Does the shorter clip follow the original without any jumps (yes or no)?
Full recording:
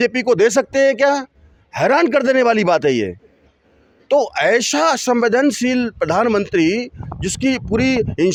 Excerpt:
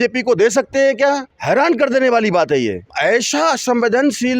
no